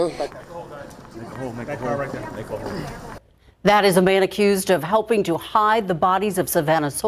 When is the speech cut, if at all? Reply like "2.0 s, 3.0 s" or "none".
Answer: none